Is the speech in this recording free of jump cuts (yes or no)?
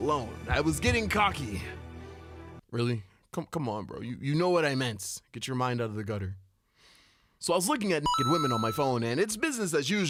yes